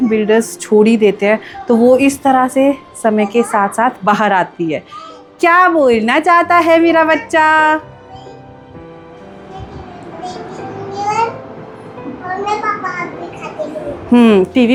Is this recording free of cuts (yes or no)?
yes